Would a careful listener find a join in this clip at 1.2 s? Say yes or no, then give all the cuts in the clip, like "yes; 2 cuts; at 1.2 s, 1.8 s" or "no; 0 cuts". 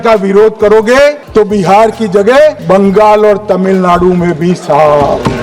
yes; 2 cuts; at 1.2 s, 2.6 s